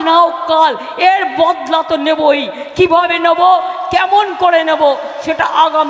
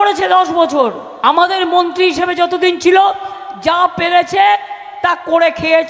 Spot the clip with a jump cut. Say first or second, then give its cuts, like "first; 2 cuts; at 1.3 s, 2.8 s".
second; 1 cut; at 1.1 s